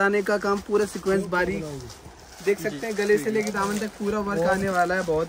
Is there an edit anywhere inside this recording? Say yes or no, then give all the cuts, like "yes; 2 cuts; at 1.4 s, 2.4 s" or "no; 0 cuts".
no; 0 cuts